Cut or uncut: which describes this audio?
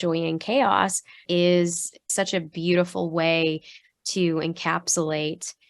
cut